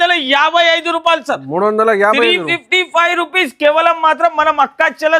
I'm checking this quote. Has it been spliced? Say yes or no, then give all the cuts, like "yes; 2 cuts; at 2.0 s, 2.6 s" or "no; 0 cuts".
no; 0 cuts